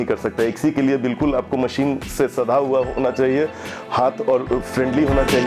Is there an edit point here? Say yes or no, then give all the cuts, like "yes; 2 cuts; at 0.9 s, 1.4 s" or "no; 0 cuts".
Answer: no; 0 cuts